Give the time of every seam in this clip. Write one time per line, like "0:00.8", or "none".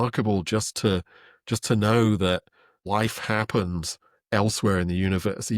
0:02.7